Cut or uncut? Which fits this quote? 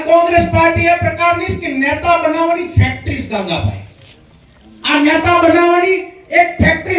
uncut